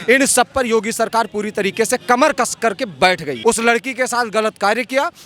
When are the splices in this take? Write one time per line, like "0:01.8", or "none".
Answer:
0:03.3